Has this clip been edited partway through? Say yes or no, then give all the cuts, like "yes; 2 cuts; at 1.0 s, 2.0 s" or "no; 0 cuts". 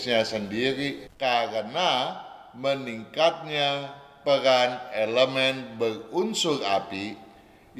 yes; 1 cut; at 1.0 s